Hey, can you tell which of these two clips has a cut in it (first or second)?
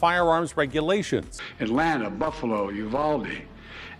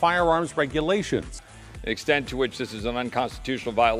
first